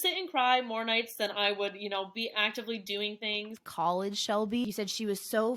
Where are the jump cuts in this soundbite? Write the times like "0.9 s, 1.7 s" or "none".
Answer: 3.6 s, 4.6 s